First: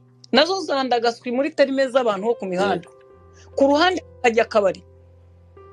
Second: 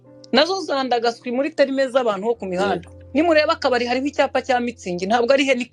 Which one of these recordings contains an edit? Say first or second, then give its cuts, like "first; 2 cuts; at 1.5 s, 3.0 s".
second; 1 cut; at 2.9 s